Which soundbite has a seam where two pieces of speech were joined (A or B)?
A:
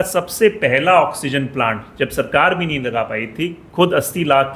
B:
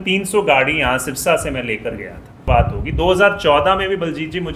B